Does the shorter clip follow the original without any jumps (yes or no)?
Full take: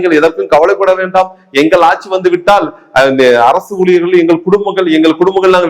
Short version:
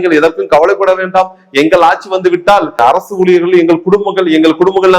no